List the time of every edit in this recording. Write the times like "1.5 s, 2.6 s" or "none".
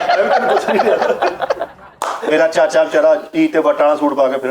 1.8 s